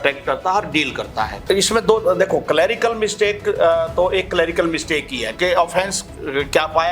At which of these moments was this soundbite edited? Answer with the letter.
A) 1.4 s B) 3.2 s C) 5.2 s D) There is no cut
A